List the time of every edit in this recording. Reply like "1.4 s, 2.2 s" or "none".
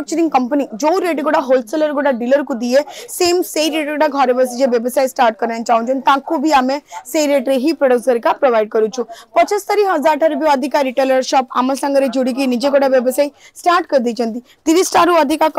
none